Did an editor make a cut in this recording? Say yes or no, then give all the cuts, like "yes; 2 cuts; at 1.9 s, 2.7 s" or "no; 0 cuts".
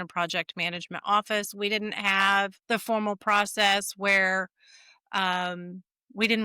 yes; 1 cut; at 2.6 s